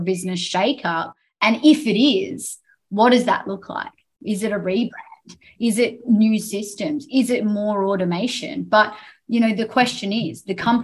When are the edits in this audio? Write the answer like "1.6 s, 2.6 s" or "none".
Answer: none